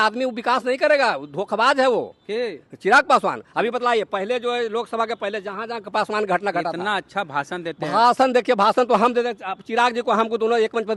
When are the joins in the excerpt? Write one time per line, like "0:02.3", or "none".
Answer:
none